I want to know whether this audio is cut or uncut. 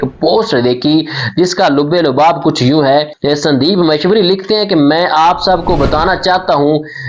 uncut